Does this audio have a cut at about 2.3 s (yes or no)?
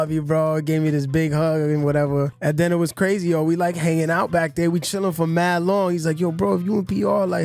yes